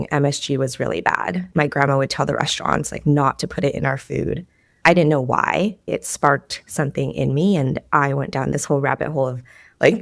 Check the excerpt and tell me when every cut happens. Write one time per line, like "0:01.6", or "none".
0:01.4
0:05.9

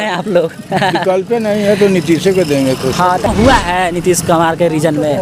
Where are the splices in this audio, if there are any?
0:03.3

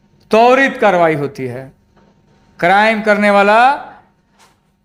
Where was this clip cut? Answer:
none

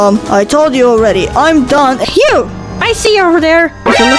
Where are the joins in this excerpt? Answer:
0:02.0

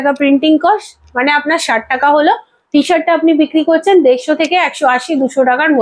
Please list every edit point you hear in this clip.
none

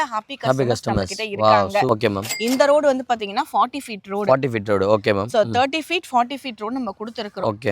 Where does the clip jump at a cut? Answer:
0:01.9

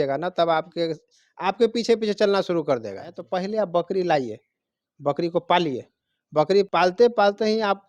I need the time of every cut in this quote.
0:03.2
0:06.7

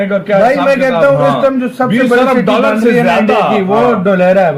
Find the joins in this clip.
none

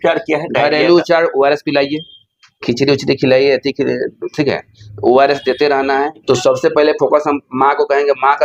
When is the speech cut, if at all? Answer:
0:06.2

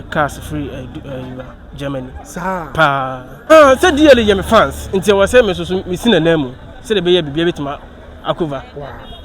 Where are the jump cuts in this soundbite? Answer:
0:03.5

